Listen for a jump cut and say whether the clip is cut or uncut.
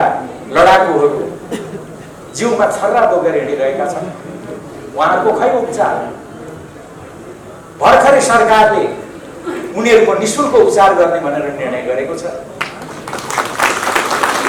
uncut